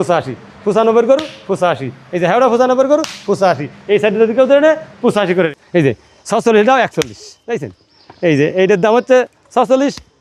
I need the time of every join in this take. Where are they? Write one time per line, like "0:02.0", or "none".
0:05.6